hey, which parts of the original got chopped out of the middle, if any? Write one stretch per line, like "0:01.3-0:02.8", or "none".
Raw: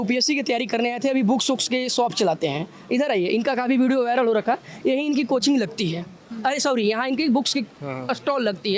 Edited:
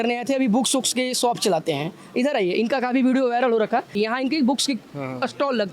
0:04.7-0:06.8